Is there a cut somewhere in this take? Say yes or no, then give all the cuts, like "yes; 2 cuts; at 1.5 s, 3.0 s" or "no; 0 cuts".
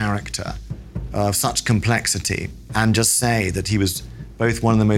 no; 0 cuts